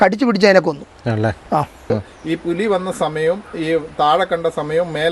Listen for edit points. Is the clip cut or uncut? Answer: cut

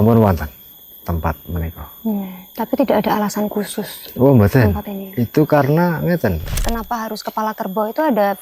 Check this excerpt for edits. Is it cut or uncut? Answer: cut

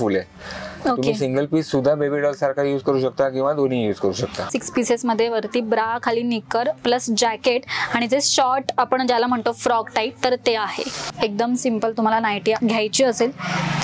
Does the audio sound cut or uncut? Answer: cut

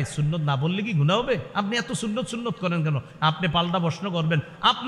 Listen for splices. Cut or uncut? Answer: uncut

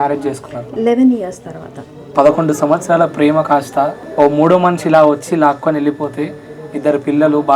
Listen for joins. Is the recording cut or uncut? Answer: cut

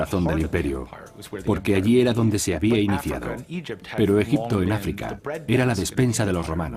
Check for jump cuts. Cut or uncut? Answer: uncut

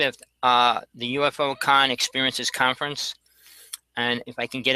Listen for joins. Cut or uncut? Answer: uncut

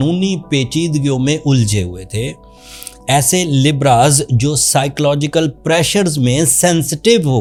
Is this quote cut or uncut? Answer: uncut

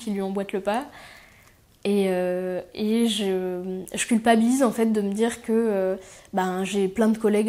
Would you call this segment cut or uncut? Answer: uncut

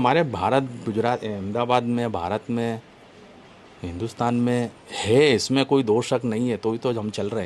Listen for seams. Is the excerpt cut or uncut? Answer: uncut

